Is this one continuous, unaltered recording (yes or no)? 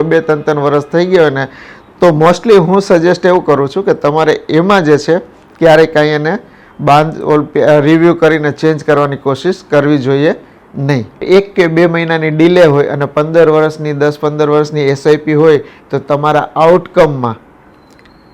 no